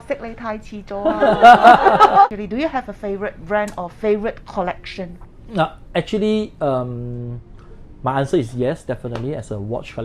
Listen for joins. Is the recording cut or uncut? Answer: uncut